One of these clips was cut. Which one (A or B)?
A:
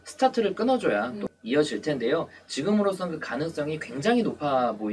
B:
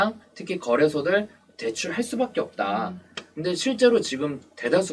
A